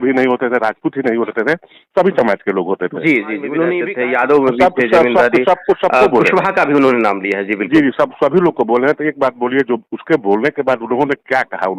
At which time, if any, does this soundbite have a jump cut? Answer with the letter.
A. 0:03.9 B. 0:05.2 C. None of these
A